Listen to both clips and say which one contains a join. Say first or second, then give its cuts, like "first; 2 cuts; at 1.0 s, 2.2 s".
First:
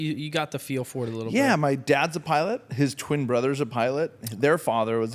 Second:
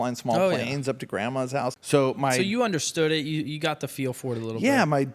second; 1 cut; at 1.8 s